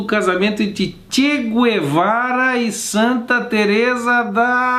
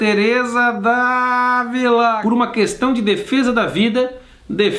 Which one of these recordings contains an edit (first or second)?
second